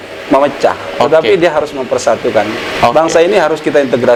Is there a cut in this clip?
no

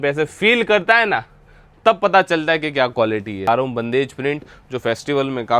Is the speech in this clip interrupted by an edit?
yes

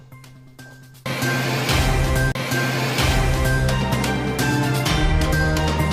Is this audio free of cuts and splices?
yes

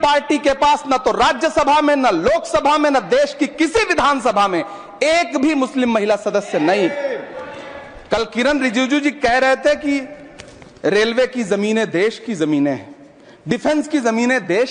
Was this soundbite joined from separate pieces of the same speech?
no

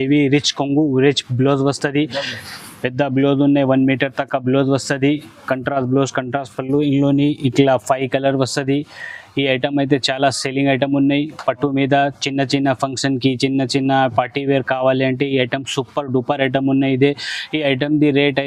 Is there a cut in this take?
no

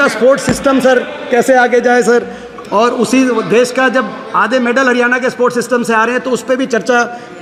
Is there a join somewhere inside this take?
no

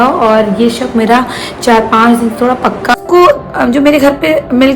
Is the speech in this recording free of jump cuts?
no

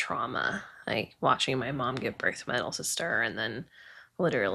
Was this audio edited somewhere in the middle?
no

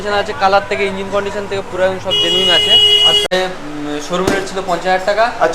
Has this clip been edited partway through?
yes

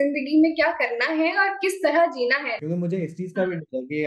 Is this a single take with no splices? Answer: no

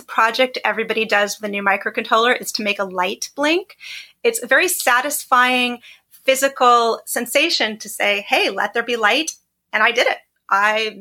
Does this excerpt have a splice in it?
no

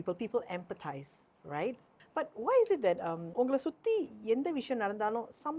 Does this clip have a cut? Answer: yes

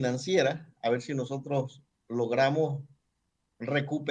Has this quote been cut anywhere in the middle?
no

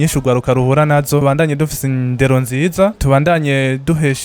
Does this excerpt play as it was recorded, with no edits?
no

